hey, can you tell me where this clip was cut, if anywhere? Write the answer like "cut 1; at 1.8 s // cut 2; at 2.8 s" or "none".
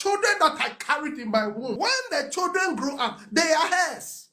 cut 1; at 1.7 s